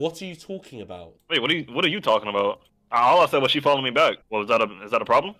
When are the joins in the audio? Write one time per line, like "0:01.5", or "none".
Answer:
0:01.1
0:02.7
0:04.2